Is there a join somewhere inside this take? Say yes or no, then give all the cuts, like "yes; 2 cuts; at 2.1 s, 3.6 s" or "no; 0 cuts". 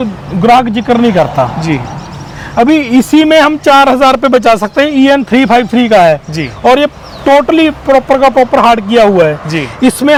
no; 0 cuts